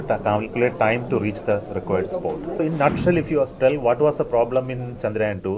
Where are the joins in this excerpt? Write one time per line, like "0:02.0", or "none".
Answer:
0:02.6